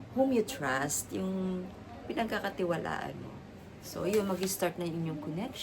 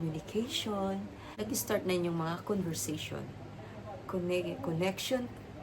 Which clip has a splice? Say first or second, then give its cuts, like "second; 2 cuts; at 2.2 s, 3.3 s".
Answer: second; 1 cut; at 1.3 s